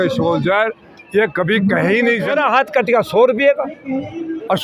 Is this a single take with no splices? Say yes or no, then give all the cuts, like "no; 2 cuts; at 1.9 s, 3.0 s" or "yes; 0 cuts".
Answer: no; 1 cut; at 2.3 s